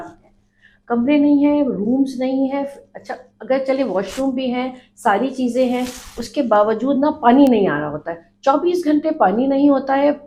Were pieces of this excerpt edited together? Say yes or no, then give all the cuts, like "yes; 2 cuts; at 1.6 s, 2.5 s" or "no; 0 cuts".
no; 0 cuts